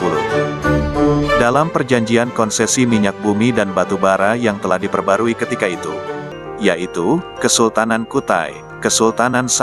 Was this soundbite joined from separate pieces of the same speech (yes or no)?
yes